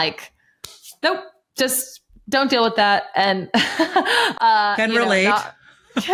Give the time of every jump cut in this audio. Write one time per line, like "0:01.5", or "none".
none

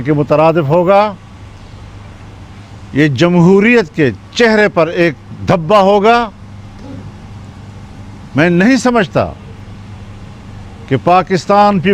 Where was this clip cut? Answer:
none

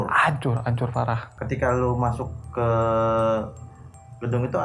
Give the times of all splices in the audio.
0:01.3

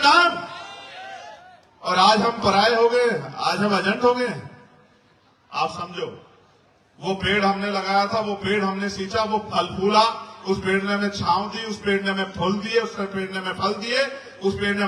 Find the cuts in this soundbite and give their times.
none

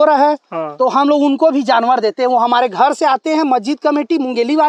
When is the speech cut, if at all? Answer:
none

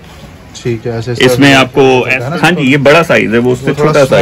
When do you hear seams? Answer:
0:02.2

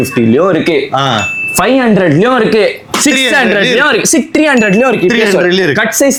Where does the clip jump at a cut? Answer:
none

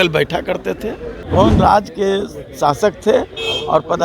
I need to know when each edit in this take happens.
0:01.1

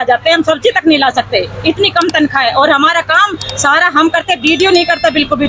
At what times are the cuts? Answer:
none

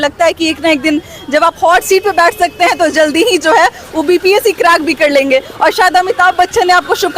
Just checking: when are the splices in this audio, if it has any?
none

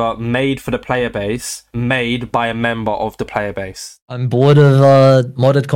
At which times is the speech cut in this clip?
0:04.0

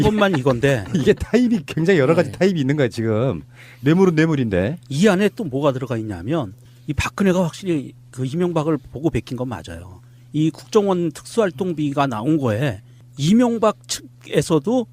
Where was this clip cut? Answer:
0:05.5

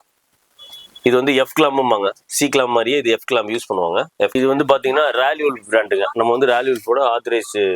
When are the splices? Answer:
0:04.3

